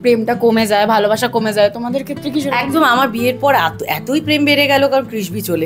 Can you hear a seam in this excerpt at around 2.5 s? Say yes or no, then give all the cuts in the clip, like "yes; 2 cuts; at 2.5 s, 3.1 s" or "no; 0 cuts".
no; 0 cuts